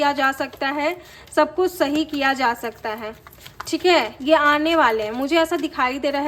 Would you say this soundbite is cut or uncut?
uncut